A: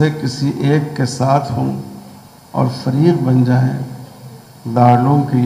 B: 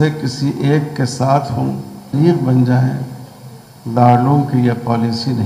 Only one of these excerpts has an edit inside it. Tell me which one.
B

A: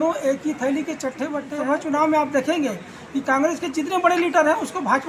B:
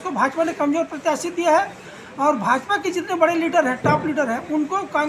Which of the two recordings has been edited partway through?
A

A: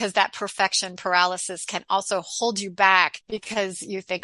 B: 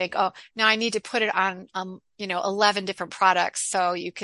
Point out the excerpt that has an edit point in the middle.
A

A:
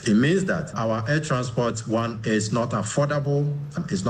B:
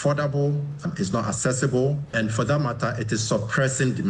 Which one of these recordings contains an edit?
B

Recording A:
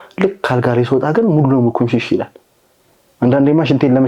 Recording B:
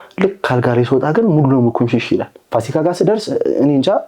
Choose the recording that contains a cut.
B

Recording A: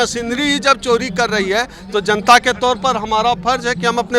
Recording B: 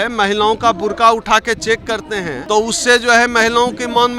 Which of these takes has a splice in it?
B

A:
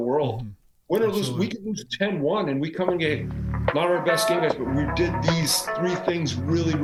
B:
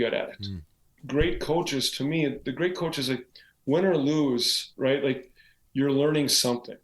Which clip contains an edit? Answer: B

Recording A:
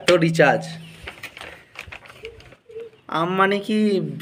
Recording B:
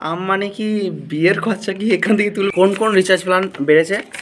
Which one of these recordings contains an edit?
B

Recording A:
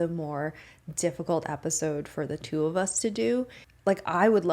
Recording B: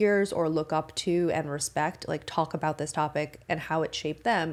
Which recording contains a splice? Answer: A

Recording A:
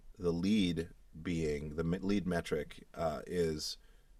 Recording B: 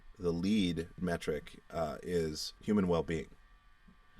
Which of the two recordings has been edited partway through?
B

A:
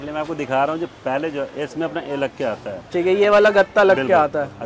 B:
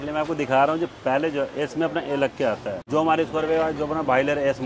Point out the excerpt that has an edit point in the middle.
B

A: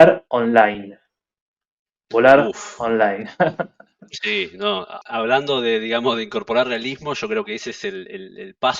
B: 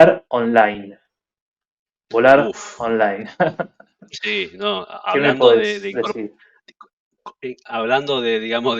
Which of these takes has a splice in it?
A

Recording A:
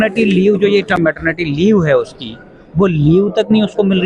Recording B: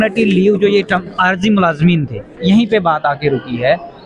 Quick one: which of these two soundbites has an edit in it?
A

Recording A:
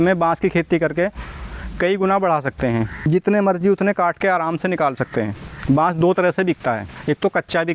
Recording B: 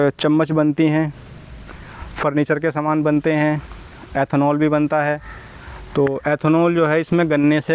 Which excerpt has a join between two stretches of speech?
A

